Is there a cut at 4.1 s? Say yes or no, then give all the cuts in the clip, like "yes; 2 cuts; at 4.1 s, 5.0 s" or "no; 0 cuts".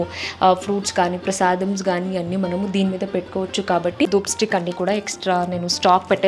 yes; 1 cut; at 4.1 s